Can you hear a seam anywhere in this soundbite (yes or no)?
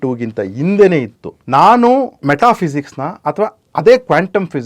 yes